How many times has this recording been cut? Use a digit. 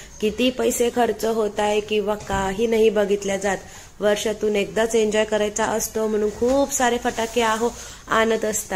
0